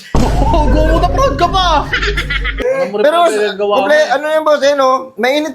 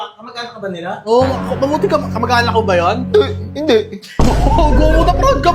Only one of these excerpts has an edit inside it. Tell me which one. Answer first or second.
first